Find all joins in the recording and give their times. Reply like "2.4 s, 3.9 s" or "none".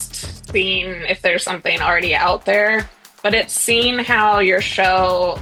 none